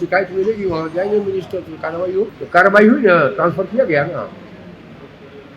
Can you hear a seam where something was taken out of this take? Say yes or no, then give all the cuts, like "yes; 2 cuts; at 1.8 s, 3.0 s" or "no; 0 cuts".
yes; 1 cut; at 2.4 s